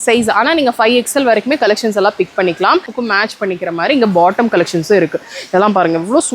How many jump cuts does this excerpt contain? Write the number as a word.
one